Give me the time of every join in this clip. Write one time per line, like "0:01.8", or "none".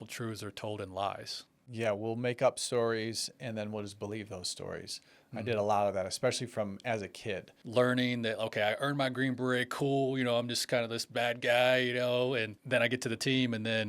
0:01.7
0:07.5
0:12.5